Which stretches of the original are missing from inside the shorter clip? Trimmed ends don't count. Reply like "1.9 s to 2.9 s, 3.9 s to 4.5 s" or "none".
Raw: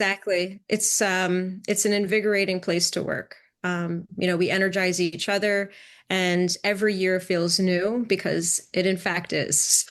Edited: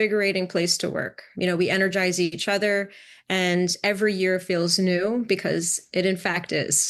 3.4 s to 4.1 s